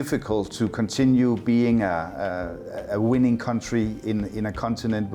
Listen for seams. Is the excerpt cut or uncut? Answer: uncut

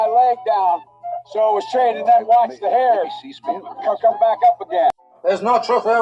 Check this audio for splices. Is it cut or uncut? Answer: uncut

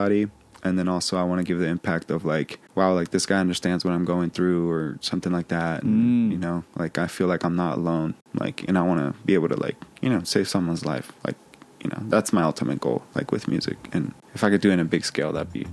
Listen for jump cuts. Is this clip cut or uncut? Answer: cut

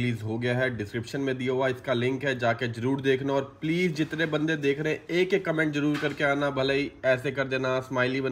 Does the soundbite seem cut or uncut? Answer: uncut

